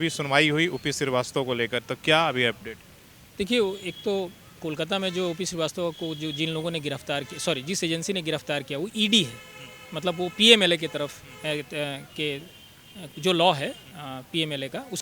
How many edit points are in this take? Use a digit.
0